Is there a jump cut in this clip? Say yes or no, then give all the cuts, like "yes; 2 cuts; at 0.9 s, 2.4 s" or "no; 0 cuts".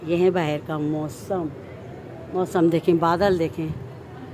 no; 0 cuts